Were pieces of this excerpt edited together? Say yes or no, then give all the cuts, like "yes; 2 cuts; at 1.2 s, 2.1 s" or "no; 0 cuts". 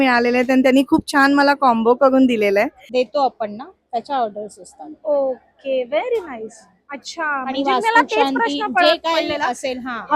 yes; 1 cut; at 2.8 s